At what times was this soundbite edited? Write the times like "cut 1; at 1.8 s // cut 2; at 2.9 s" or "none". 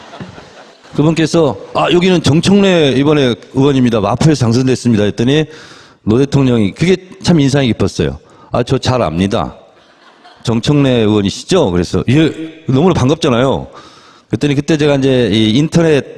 cut 1; at 7.9 s